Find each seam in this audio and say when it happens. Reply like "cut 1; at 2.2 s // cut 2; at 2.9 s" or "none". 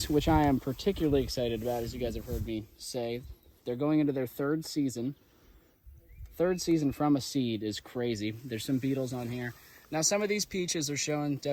none